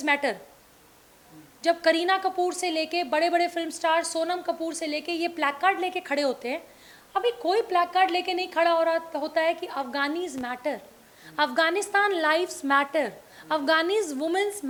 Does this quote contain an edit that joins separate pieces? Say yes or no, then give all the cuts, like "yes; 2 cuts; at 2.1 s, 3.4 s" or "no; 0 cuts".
no; 0 cuts